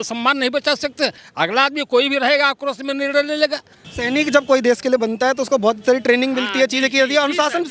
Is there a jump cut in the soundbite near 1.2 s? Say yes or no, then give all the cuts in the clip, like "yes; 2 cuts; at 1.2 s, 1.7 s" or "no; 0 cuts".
yes; 2 cuts; at 1.2 s, 3.8 s